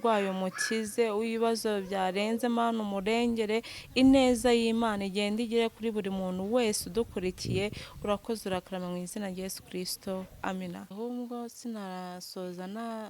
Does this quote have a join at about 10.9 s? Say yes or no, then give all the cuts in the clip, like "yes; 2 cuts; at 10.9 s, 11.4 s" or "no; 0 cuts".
yes; 1 cut; at 10.9 s